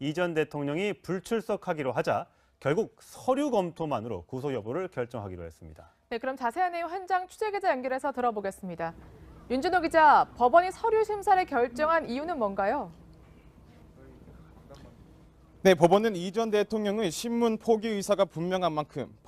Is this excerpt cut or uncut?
uncut